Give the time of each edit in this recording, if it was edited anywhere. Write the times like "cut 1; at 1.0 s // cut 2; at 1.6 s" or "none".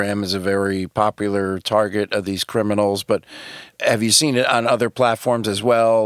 none